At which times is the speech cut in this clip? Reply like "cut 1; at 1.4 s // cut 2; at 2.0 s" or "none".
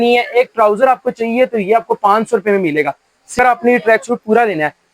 cut 1; at 3.4 s